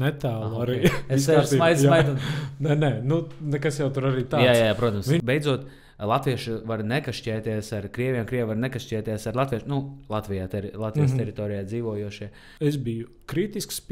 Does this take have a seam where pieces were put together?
yes; 2 cuts; at 5.2 s, 12.4 s

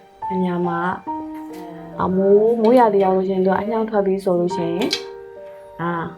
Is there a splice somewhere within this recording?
yes; 1 cut; at 1.7 s

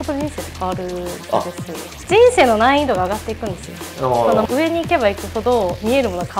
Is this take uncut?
no; 2 cuts; at 1.9 s, 4.4 s

